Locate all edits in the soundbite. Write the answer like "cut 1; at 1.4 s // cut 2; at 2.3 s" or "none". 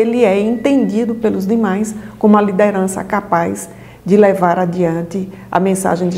none

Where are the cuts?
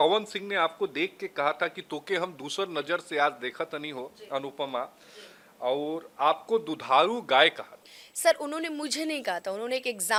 none

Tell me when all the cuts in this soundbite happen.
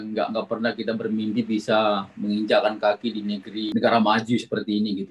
cut 1; at 3.7 s

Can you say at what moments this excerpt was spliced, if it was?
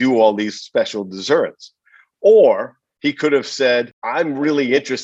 cut 1; at 4.0 s

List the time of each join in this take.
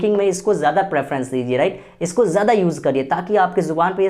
none

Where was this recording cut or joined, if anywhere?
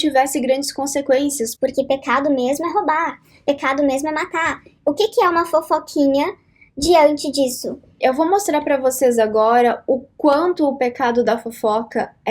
none

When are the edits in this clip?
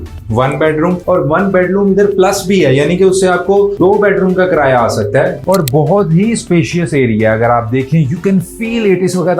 cut 1; at 5.4 s

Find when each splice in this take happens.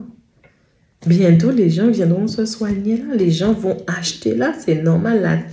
none

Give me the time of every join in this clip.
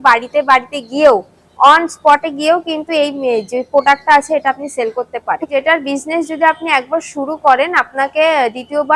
cut 1; at 5.5 s

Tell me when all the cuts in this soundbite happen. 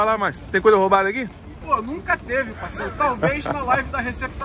cut 1; at 1.2 s

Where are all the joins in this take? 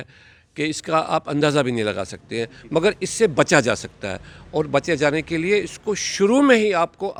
none

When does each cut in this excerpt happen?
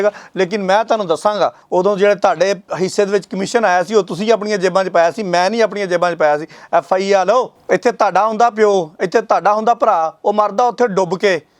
cut 1; at 1.6 s // cut 2; at 7.6 s

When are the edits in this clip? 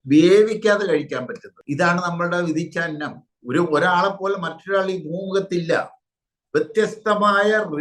cut 1; at 3.3 s

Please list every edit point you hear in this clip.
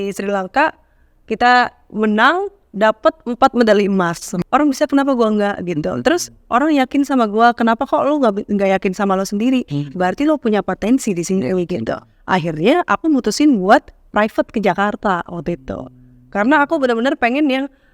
cut 1; at 4.3 s

